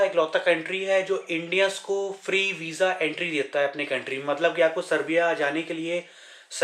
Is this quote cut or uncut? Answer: uncut